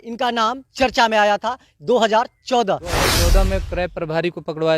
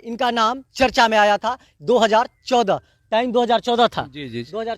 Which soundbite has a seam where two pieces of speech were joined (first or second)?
first